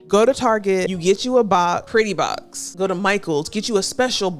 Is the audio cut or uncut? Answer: cut